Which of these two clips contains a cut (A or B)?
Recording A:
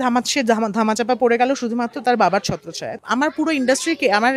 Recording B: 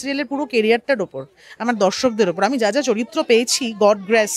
A